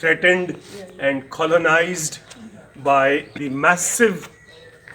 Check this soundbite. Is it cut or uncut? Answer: cut